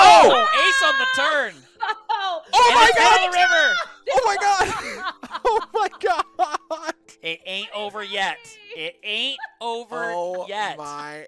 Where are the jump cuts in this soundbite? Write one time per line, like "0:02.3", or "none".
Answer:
0:07.0